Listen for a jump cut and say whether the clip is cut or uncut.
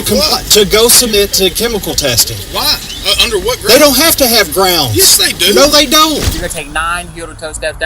cut